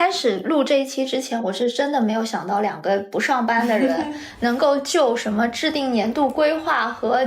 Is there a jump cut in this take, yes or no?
no